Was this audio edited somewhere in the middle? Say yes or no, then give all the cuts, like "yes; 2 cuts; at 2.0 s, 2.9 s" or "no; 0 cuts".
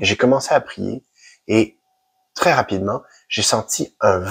no; 0 cuts